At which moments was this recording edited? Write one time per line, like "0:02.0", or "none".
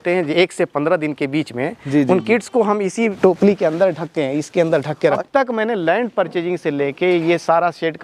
0:03.2
0:05.2